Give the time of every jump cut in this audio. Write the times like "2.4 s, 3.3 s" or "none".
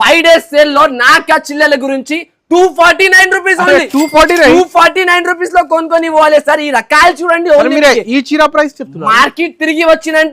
none